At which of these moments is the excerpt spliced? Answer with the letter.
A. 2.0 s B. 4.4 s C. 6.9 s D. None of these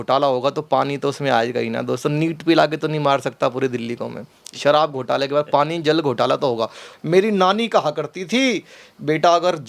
C